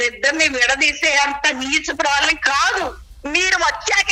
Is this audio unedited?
no; 1 cut; at 3.0 s

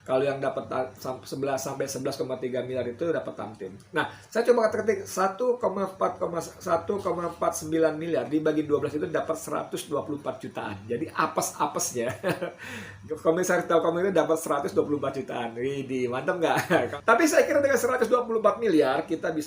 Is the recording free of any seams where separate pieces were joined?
no; 1 cut; at 16.9 s

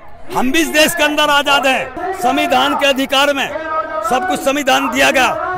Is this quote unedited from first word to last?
no; 1 cut; at 2.0 s

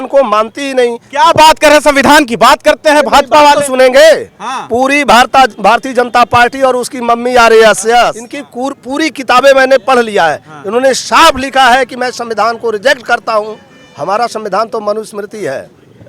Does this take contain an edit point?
no; 0 cuts

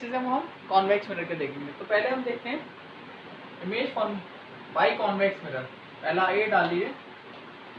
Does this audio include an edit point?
no; 0 cuts

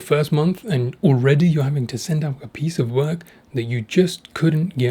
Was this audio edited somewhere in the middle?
no; 0 cuts

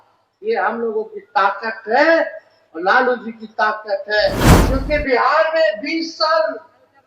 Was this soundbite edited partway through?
yes; 1 cut; at 4.5 s

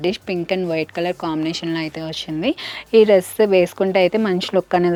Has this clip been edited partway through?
no; 0 cuts

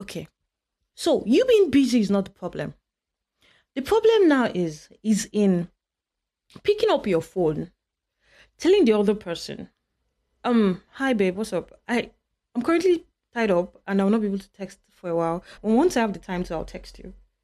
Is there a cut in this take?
yes; 1 cut; at 15.5 s

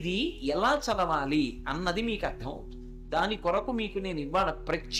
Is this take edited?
no; 0 cuts

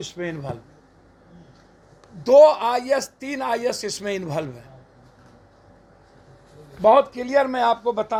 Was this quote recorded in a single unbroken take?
yes; 0 cuts

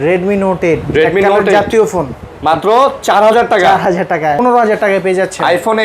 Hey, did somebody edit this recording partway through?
yes; 1 cut; at 4.4 s

